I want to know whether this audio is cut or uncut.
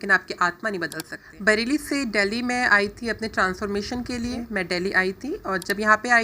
cut